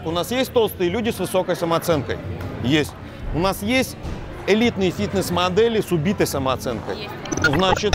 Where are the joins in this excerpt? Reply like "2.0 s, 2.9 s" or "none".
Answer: none